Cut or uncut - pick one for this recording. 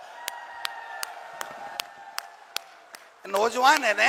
uncut